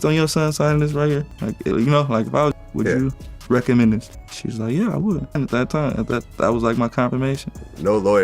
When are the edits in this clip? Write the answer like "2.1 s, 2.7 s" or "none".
2.5 s, 5.4 s